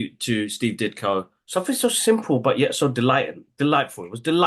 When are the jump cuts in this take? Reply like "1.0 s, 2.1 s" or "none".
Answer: 1.4 s

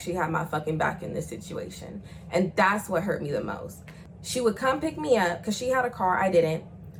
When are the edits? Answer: none

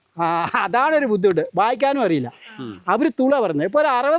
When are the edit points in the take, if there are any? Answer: none

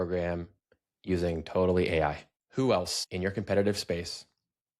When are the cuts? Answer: 2.3 s, 3.0 s

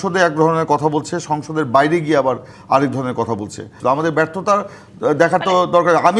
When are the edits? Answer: 3.7 s

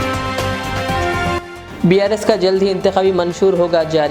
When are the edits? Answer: 1.3 s

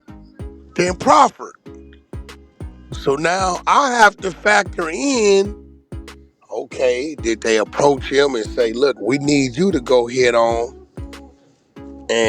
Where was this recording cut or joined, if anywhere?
9.0 s

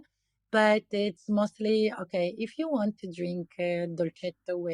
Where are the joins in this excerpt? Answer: none

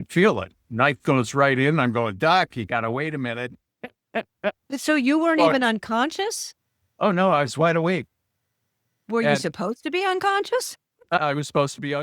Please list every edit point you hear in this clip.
none

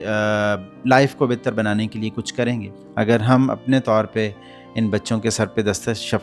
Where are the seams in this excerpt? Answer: 2.8 s

